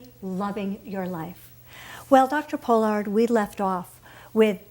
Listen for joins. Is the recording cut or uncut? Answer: cut